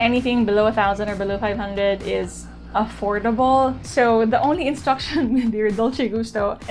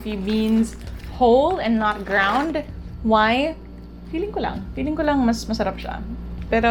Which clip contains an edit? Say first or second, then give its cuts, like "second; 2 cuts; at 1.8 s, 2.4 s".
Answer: first; 1 cut; at 3.8 s